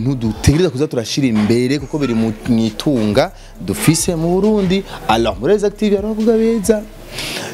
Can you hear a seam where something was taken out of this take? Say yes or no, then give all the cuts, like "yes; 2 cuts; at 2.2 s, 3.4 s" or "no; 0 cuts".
no; 0 cuts